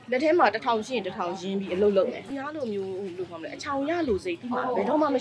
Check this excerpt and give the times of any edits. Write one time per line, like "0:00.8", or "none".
0:02.2